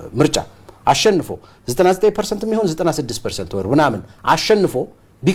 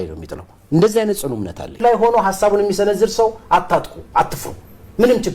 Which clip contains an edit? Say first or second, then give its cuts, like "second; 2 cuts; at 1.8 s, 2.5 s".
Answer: second; 1 cut; at 1.8 s